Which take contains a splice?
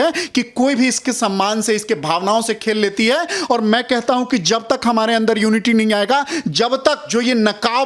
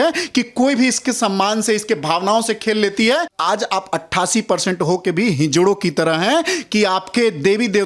second; 1 cut; at 3.3 s

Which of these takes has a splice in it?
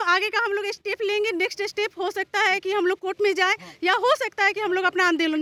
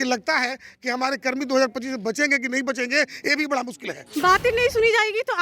second; 1 cut; at 4.0 s

